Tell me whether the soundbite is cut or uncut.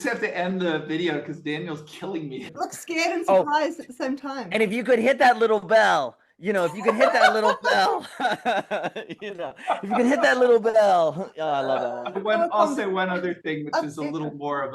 cut